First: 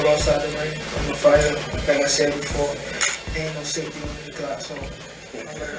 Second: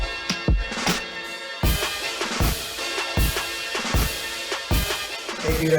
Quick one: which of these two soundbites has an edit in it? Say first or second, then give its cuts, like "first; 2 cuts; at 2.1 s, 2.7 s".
second; 1 cut; at 1.1 s